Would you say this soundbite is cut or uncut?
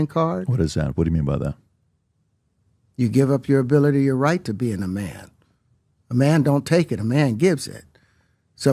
uncut